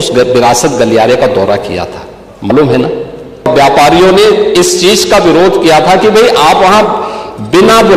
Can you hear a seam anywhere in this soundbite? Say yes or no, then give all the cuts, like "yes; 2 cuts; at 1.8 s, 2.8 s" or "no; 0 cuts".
yes; 1 cut; at 3.5 s